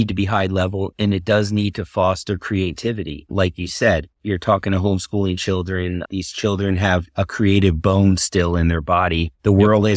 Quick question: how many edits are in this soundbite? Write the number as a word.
three